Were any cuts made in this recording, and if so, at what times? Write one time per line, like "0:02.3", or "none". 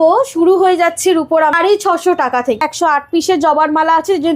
0:01.5
0:02.6